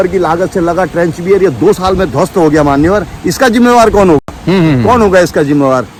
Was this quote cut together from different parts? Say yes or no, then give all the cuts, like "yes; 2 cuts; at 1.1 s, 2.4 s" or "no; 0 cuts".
no; 0 cuts